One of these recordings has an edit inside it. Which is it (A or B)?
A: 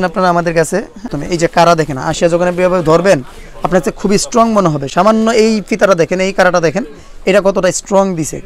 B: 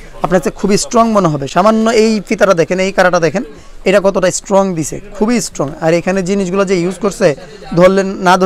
A